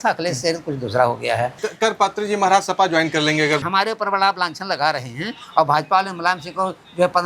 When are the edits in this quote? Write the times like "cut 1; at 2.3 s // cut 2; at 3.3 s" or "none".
cut 1; at 1.6 s // cut 2; at 3.6 s